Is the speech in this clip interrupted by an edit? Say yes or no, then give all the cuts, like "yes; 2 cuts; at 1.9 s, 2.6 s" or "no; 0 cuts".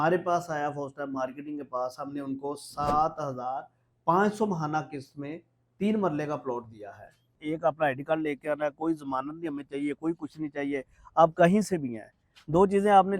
yes; 1 cut; at 7.4 s